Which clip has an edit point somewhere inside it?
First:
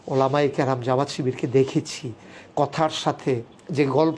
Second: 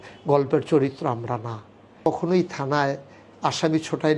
second; 1 cut; at 2.1 s

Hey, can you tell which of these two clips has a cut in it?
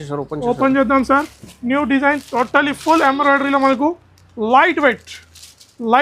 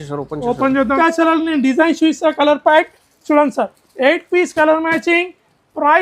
second; 1 cut; at 0.9 s

